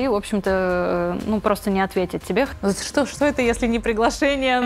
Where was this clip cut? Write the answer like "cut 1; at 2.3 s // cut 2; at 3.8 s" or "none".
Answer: cut 1; at 2.5 s